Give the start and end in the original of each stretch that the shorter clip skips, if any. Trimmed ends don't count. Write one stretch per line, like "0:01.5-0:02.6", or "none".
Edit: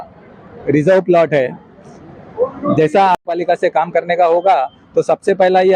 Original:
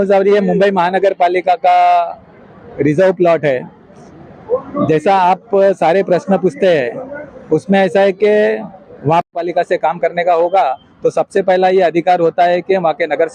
0:05.3-0:09.2